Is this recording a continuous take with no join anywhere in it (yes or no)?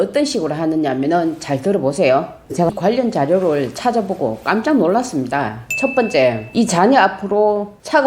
no